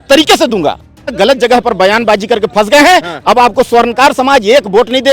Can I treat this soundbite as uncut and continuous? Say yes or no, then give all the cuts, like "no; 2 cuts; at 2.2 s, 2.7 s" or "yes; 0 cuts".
no; 1 cut; at 1.1 s